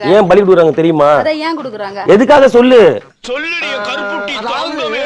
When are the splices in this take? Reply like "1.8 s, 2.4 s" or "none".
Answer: none